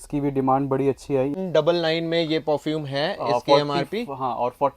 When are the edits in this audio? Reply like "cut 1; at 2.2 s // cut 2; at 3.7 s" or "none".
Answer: cut 1; at 1.4 s